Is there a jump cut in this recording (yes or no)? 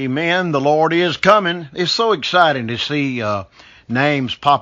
yes